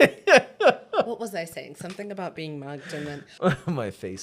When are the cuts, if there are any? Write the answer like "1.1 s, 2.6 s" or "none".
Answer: 3.2 s